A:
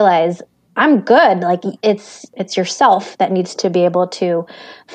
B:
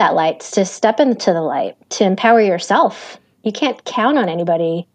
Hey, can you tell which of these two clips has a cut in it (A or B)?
A